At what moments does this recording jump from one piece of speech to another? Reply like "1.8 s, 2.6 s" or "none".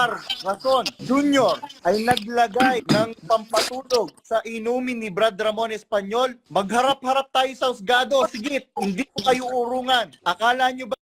1.0 s, 1.7 s, 2.8 s, 6.4 s, 10.1 s